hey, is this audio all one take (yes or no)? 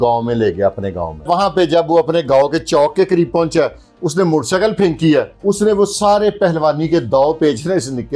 no